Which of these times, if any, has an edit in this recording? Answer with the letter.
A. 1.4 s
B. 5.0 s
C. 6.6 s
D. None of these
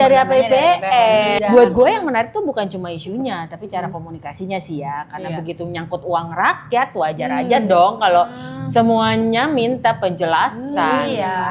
A